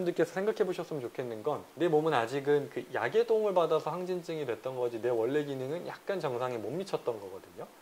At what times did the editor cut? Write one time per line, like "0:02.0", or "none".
0:01.7